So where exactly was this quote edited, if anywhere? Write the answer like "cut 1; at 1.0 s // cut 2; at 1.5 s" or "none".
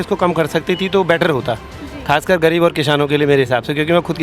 none